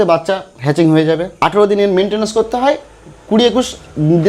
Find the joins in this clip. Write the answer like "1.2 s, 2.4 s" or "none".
1.3 s